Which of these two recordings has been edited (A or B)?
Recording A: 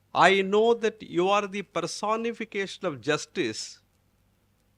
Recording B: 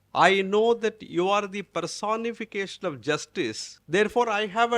B